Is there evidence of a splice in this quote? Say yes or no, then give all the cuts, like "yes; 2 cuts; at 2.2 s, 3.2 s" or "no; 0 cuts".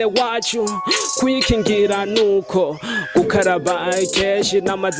no; 0 cuts